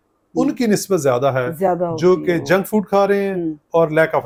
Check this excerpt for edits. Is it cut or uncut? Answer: uncut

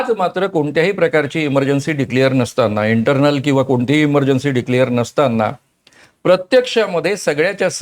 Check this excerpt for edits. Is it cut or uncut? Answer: uncut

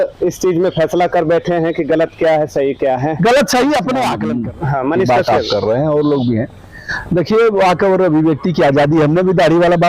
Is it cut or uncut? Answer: cut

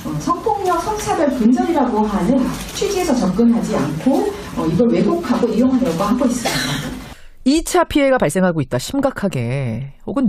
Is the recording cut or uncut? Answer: cut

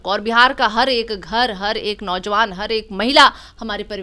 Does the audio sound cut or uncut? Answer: uncut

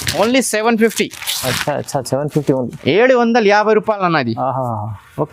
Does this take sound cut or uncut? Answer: uncut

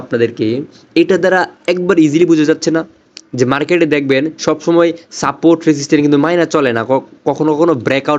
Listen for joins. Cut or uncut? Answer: uncut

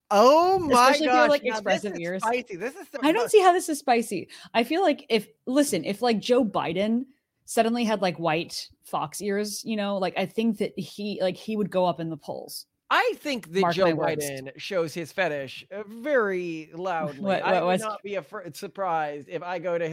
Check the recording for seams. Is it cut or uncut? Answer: uncut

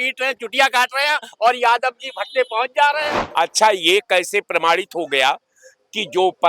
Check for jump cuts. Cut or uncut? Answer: cut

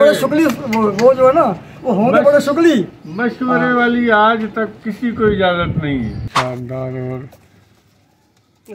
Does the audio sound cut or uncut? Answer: cut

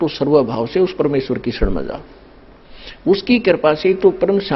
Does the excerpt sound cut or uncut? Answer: uncut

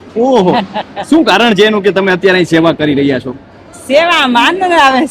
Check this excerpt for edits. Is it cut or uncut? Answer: uncut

